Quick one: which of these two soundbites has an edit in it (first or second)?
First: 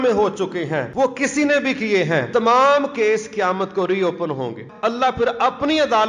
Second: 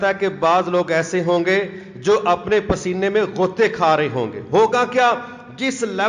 first